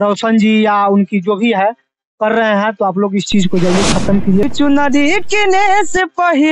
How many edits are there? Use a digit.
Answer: 1